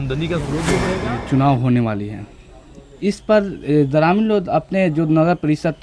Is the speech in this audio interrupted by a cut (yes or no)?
yes